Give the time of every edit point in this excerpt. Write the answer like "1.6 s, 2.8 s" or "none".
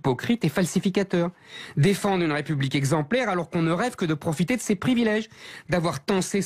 none